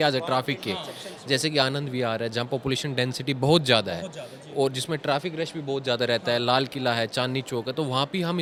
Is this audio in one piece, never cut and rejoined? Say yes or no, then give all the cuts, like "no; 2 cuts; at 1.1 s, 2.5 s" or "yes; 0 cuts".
yes; 0 cuts